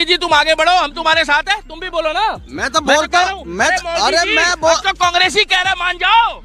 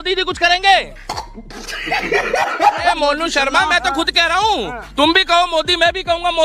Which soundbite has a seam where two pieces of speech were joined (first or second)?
second